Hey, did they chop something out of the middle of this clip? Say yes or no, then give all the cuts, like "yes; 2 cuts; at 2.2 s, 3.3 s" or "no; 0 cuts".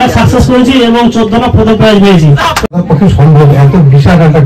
yes; 1 cut; at 2.7 s